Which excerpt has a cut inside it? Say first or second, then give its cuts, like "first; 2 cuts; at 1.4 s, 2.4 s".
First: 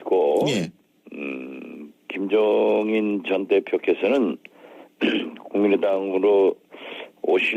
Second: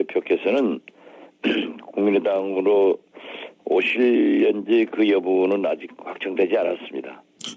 first; 1 cut; at 1.5 s